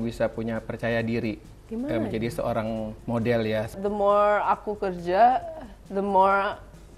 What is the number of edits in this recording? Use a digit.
2